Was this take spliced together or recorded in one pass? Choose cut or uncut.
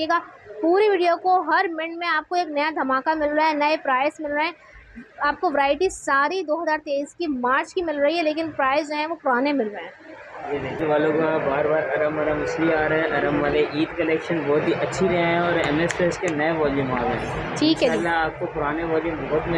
cut